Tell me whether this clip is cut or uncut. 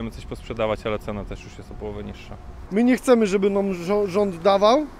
cut